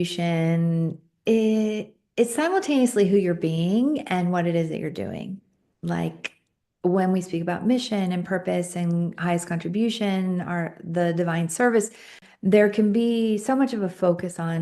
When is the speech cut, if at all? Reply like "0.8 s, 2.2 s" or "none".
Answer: 12.3 s